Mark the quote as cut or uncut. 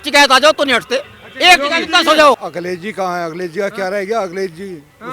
cut